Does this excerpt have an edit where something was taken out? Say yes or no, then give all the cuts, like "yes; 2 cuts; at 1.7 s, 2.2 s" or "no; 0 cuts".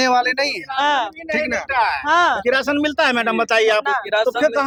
no; 0 cuts